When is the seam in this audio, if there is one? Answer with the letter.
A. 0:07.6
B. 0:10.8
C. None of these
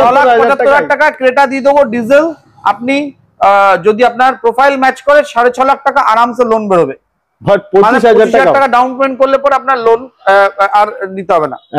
C